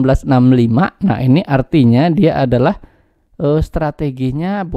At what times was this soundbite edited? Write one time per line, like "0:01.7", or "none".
none